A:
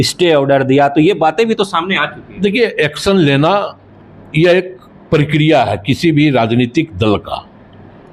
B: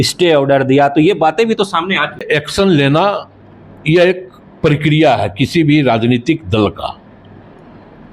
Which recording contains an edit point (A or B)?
B